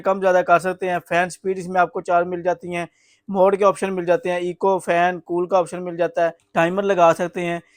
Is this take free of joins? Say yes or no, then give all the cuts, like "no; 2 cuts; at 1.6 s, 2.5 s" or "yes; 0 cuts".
no; 1 cut; at 6.4 s